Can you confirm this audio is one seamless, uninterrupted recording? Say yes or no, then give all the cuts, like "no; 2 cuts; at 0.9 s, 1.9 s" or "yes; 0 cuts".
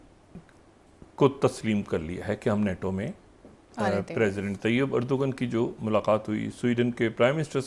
yes; 0 cuts